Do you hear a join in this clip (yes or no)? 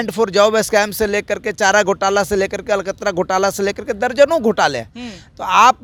no